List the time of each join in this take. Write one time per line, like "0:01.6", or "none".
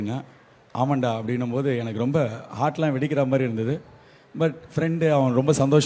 none